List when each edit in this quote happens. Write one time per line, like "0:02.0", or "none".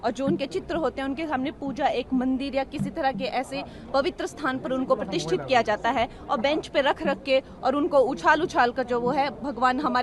none